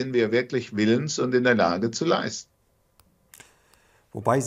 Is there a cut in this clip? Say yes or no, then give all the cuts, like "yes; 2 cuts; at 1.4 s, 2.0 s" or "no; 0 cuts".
no; 0 cuts